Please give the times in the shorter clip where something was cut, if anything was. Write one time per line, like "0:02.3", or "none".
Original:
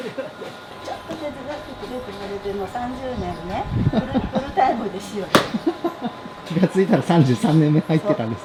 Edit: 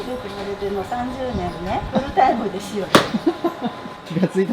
0:01.9